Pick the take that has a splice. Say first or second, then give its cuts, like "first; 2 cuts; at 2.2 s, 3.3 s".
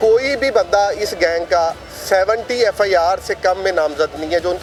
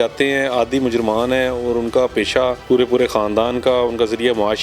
second; 1 cut; at 2.6 s